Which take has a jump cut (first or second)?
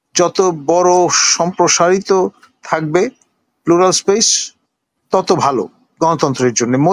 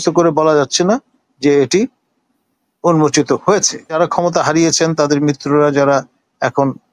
second